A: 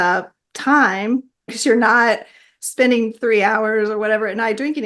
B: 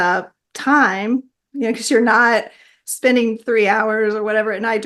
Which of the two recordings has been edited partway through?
A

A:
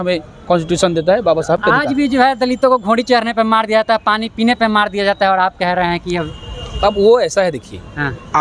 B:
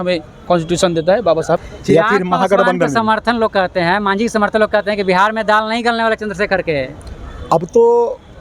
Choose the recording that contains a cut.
B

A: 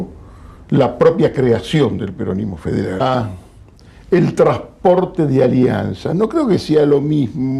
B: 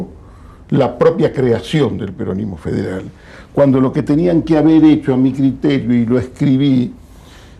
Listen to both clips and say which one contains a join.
B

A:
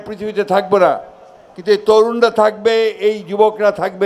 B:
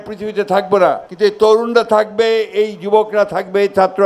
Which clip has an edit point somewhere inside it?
B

